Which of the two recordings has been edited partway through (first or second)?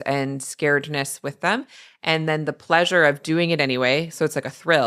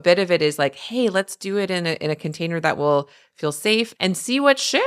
second